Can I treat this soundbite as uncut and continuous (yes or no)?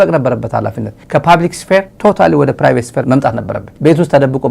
no